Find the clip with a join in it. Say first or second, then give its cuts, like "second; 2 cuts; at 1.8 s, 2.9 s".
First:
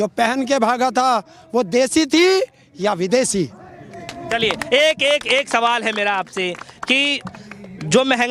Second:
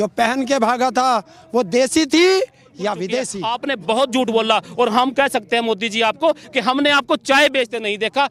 second; 1 cut; at 3.3 s